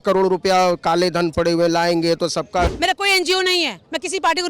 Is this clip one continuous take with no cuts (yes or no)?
no